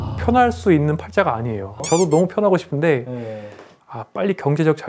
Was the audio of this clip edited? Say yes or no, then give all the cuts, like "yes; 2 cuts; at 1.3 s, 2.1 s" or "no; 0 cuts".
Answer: yes; 2 cuts; at 1.8 s, 3.8 s